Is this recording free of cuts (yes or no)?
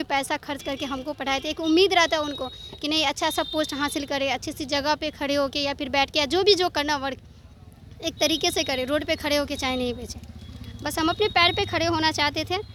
yes